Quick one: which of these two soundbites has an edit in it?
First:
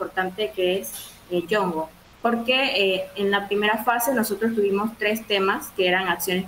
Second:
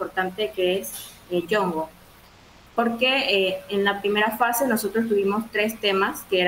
first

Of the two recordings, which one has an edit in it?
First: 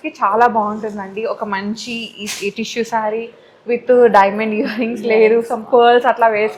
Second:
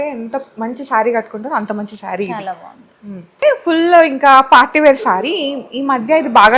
second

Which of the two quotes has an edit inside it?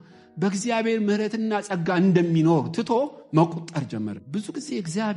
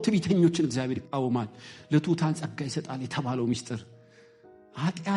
first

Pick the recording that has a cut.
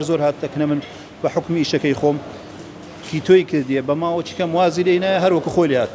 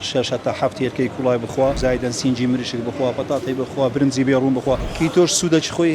second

